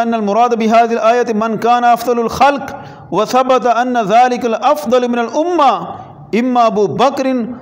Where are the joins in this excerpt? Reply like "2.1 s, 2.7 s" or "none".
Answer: none